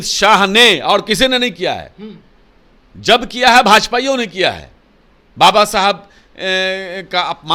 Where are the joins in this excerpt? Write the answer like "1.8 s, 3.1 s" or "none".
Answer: none